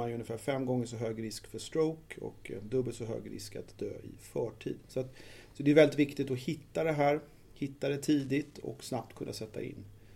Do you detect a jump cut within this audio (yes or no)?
no